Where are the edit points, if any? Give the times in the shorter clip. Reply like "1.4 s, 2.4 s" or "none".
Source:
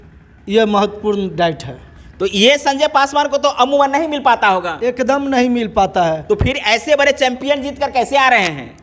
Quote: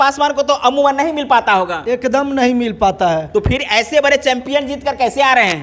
none